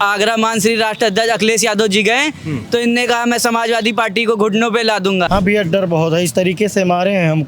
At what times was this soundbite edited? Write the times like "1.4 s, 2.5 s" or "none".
5.3 s